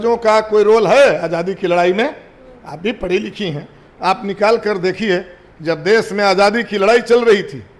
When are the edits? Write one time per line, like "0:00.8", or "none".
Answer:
none